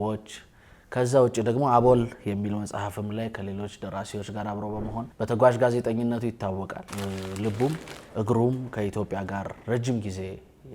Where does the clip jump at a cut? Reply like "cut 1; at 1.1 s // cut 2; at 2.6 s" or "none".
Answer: cut 1; at 5.1 s // cut 2; at 6.8 s

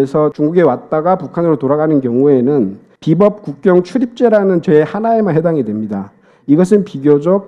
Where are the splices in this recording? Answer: none

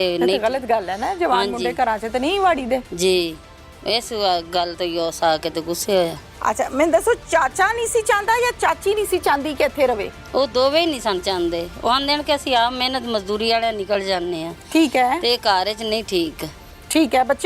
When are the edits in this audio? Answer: none

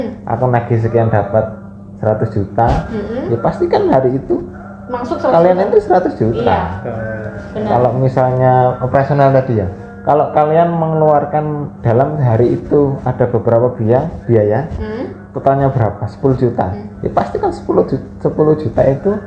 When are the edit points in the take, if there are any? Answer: none

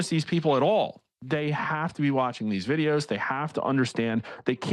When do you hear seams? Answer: none

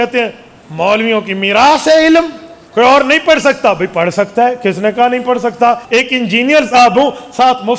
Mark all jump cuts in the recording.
cut 1; at 2.6 s // cut 2; at 5.8 s

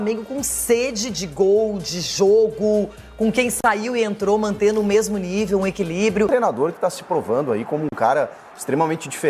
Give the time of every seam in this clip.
cut 1; at 6.3 s

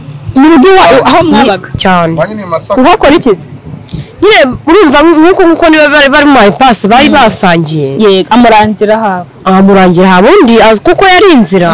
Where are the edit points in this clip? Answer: none

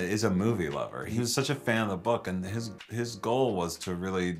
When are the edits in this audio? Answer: cut 1; at 1.1 s

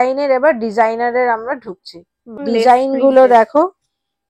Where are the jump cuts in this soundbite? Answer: cut 1; at 2.3 s

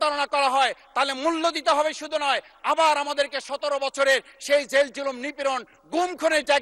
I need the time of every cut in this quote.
none

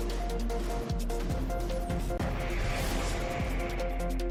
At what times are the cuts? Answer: none

